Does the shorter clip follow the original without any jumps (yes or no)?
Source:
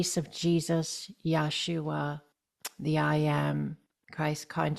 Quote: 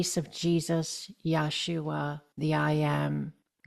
no